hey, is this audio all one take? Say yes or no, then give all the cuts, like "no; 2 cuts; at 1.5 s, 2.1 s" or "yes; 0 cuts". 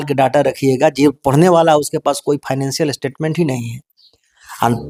yes; 0 cuts